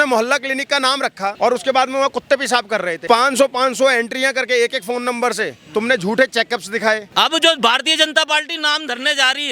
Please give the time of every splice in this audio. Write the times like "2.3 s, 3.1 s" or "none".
1.3 s, 3.0 s, 7.1 s